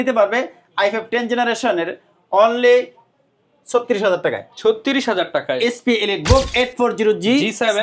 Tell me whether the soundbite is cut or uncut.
uncut